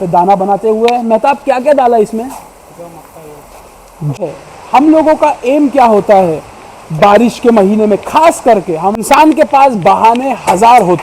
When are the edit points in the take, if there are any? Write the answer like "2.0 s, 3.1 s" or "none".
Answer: 4.2 s, 9.0 s